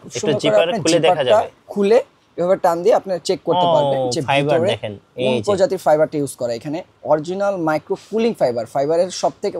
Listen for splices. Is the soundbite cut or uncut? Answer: uncut